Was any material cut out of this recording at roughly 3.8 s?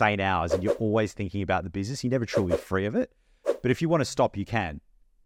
no; 0 cuts

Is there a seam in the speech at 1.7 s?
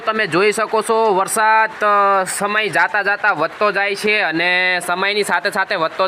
no; 0 cuts

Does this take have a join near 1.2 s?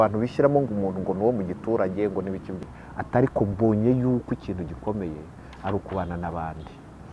no; 1 cut; at 2.5 s

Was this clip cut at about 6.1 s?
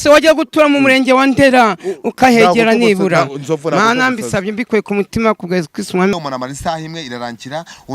yes; 1 cut; at 6.1 s

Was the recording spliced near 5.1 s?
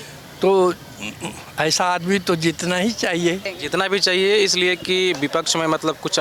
no; 1 cut; at 3.5 s

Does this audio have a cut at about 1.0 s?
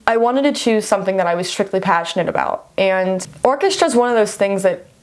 no; 1 cut; at 3.3 s

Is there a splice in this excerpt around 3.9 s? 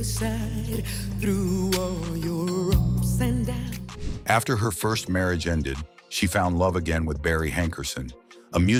no; 0 cuts

